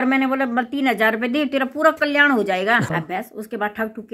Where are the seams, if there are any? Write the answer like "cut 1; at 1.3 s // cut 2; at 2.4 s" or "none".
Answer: cut 1; at 2.9 s